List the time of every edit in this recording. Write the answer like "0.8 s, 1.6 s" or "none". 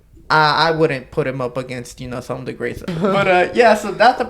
2.8 s